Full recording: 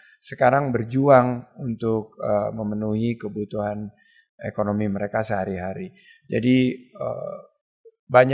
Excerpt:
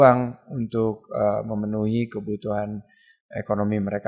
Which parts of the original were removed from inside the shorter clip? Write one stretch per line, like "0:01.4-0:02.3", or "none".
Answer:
none